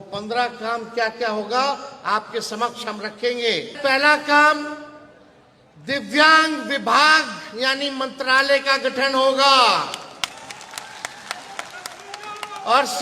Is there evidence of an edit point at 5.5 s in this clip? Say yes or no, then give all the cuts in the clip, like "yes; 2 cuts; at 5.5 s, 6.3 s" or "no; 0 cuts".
no; 1 cut; at 3.7 s